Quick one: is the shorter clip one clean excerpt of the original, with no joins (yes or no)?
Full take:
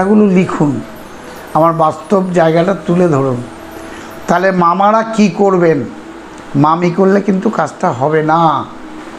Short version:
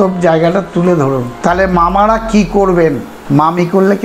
no